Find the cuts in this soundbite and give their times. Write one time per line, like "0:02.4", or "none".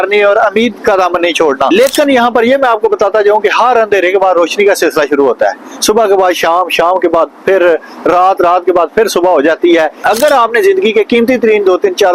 0:01.7
0:10.0